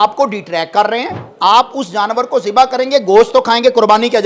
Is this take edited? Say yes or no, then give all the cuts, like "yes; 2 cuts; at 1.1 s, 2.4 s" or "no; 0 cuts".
yes; 1 cut; at 1.2 s